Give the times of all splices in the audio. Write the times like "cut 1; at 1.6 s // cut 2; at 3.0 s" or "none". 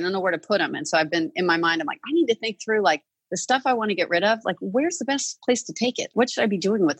cut 1; at 6.1 s